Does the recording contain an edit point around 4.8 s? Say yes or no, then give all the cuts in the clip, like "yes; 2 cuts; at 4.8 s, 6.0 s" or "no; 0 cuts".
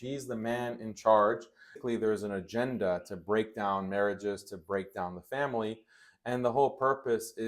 no; 1 cut; at 1.7 s